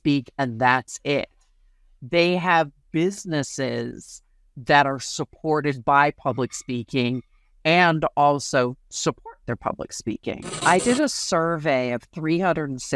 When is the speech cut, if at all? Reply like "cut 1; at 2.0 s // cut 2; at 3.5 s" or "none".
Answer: cut 1; at 10.5 s